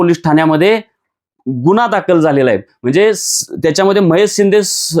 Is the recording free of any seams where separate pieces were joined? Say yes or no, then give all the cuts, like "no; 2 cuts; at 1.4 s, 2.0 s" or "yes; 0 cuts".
yes; 0 cuts